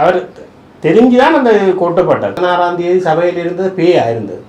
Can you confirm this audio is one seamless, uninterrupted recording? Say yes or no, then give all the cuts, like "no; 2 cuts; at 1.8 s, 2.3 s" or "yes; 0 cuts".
no; 1 cut; at 2.4 s